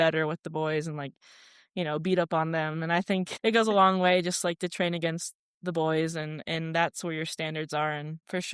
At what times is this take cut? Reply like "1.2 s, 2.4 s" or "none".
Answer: none